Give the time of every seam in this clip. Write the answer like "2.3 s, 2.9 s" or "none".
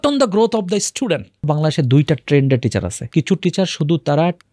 1.5 s, 3.0 s